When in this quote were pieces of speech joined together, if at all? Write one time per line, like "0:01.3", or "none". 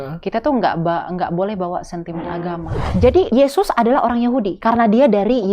0:03.1
0:04.5